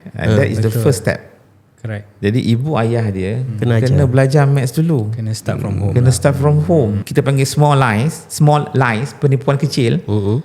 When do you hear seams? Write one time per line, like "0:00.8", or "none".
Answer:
0:07.0